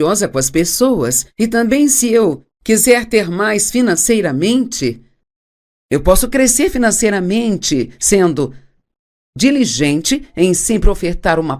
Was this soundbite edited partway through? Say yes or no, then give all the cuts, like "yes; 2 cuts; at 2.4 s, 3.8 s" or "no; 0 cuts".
yes; 1 cut; at 7.6 s